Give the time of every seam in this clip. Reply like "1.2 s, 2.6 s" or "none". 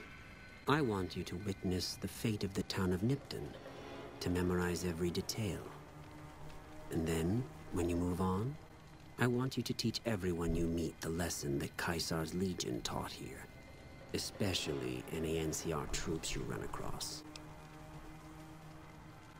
none